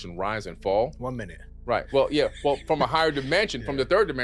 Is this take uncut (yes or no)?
yes